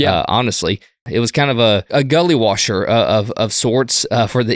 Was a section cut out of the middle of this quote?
yes; 2 cuts; at 1.1 s, 1.9 s

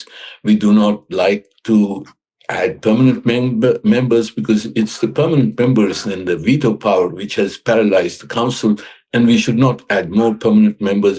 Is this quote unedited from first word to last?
yes; 0 cuts

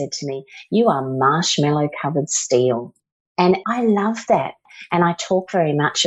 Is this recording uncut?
no; 2 cuts; at 3.5 s, 4.6 s

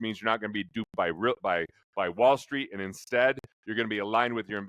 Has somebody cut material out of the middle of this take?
no; 0 cuts

